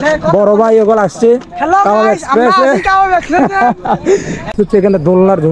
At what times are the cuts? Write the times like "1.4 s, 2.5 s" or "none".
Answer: 4.5 s